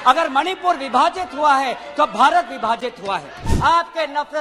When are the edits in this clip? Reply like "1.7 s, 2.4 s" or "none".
3.4 s